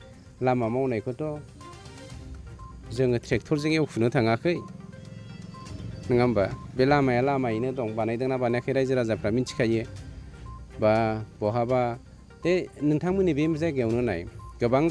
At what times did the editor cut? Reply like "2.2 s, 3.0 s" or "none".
none